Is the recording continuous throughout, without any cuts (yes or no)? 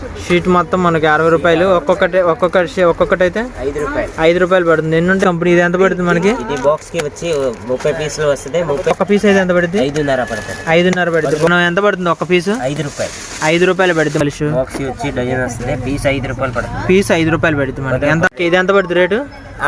no